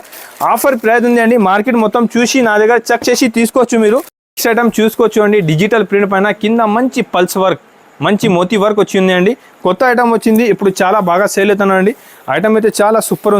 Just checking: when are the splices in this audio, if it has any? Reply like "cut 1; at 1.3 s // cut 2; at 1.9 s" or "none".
cut 1; at 4.2 s